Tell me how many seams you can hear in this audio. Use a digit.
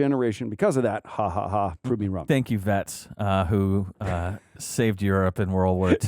1